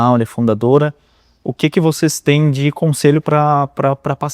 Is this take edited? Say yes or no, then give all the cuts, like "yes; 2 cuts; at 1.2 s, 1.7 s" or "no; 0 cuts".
no; 0 cuts